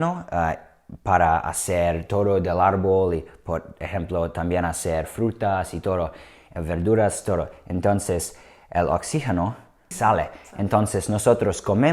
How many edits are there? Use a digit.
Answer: 1